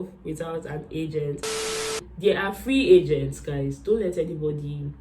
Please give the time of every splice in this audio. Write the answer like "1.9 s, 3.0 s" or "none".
1.9 s

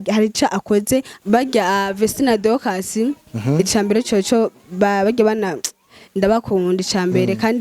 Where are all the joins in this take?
1.1 s

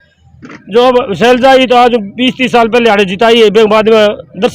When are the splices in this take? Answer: none

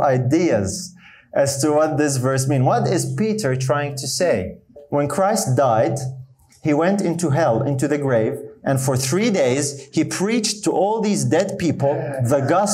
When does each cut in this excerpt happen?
4.8 s

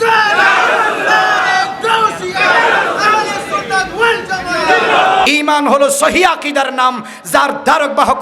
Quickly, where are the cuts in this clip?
5.3 s

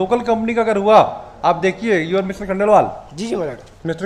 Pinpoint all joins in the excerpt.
none

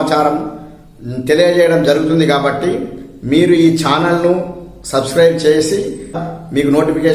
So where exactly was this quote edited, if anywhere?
6.2 s

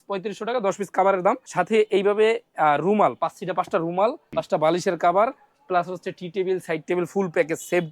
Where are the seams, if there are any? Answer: 1.5 s, 4.2 s

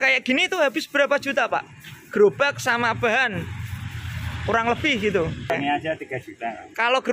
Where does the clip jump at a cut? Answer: 5.5 s

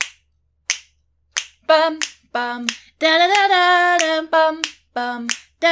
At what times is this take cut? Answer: none

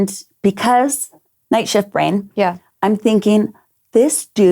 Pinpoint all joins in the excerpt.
1.3 s

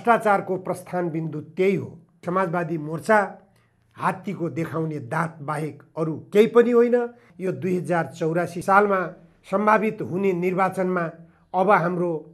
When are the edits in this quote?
2.2 s, 7.3 s

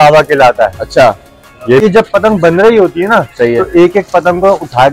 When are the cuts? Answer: 1.8 s

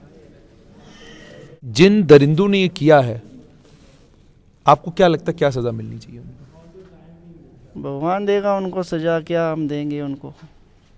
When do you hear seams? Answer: 1.7 s

